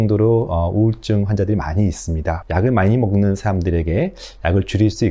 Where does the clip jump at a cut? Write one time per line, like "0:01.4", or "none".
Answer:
0:02.4